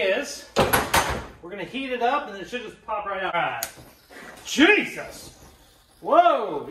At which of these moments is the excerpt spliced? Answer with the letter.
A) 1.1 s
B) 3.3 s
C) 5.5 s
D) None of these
B